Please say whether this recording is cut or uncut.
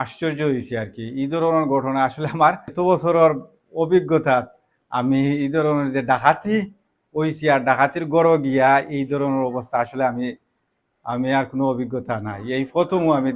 cut